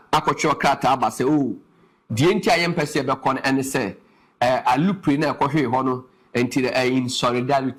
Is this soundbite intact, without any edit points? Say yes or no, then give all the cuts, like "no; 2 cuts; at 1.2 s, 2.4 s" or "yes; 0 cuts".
yes; 0 cuts